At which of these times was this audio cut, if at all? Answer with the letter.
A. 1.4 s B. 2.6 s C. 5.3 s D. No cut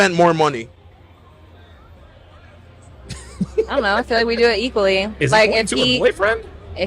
C